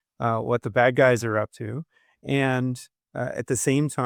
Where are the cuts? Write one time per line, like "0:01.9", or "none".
none